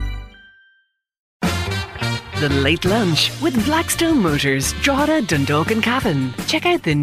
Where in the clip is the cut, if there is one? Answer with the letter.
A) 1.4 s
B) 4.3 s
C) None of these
A